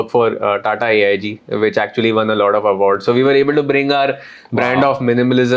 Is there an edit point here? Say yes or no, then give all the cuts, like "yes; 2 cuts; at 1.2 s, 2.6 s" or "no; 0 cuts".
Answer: no; 0 cuts